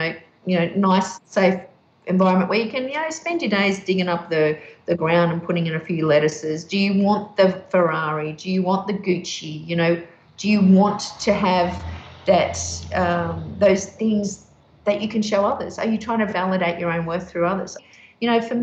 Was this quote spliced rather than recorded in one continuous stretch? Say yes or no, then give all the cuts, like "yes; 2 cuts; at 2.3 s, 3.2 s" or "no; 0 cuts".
yes; 1 cut; at 17.7 s